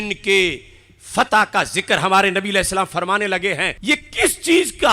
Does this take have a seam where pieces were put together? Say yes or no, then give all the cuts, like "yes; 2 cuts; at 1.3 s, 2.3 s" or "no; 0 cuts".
yes; 1 cut; at 3.8 s